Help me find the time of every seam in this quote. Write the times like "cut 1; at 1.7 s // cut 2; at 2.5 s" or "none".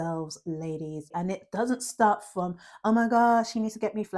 cut 1; at 1.1 s